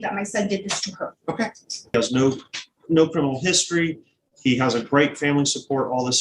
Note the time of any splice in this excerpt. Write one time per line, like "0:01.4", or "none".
0:01.9